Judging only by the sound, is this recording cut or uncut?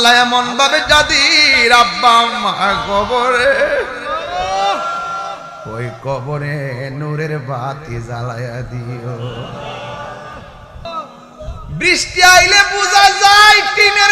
cut